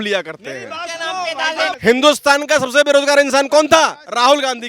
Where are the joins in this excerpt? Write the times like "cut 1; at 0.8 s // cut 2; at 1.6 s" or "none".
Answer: cut 1; at 1.7 s